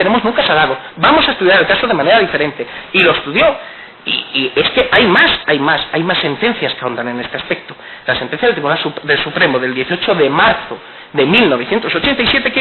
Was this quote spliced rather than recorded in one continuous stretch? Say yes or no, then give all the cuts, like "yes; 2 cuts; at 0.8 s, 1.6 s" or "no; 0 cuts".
yes; 1 cut; at 11.6 s